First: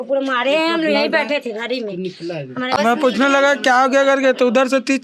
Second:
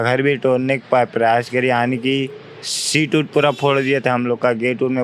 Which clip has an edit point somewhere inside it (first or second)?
first